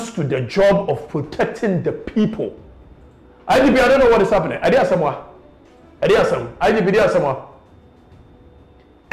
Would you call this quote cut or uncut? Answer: uncut